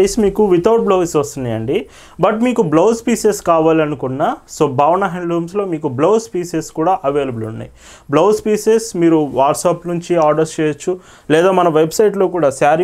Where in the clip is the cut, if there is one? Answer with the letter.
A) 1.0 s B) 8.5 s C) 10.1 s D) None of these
D